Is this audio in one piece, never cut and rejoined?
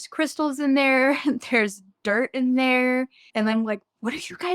yes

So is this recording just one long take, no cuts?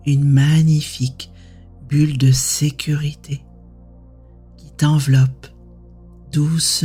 yes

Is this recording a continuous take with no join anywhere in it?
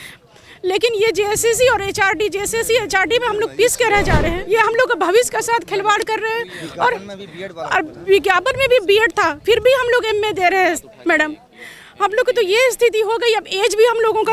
no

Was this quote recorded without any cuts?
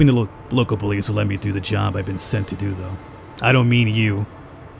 no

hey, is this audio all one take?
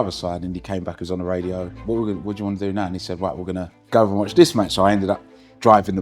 no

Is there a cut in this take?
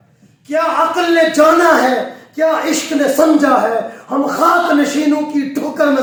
no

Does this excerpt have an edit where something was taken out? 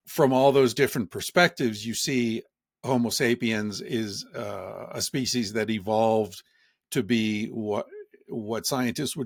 no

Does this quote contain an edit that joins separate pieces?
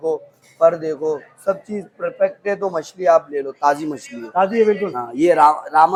no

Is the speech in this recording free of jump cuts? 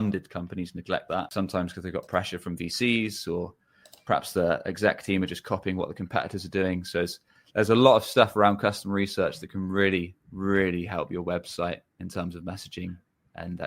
no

